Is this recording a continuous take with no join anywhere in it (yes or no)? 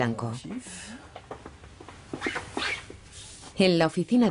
no